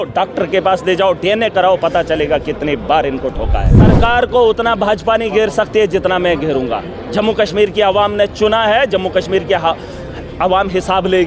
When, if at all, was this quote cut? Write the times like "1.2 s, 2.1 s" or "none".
3.7 s